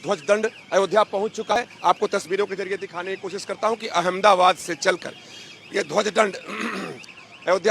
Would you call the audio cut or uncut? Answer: cut